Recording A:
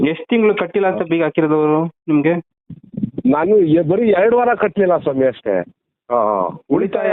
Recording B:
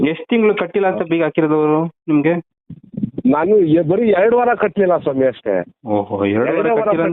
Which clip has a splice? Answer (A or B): A